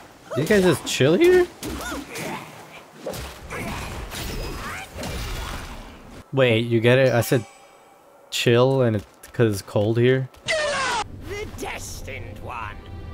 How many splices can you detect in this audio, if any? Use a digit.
0